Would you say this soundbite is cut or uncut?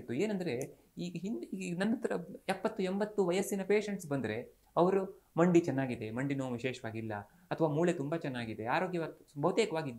uncut